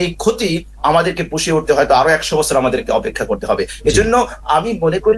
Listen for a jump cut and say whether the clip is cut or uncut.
uncut